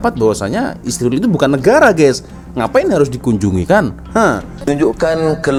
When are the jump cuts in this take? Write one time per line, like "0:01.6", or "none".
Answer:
none